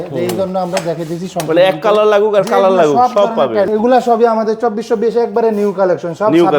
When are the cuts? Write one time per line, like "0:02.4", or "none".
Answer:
0:03.7